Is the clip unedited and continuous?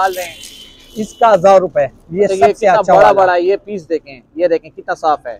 yes; 0 cuts

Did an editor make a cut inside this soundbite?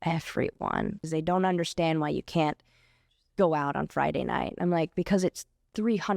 yes; 1 cut; at 1.1 s

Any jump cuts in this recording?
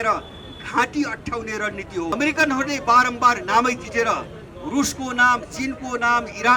yes; 1 cut; at 2.1 s

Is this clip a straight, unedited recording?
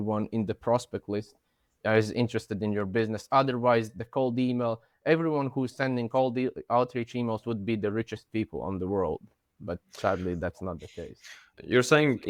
yes; 0 cuts

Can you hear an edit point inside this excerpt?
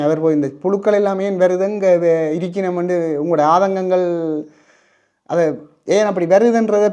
no; 0 cuts

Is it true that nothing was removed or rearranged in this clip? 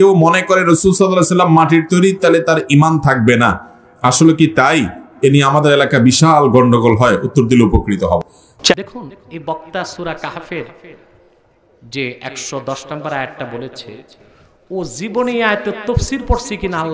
no; 1 cut; at 8.4 s

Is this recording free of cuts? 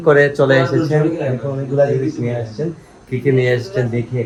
yes; 0 cuts

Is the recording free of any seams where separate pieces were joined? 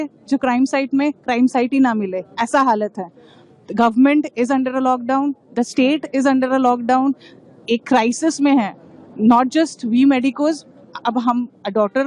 yes; 0 cuts

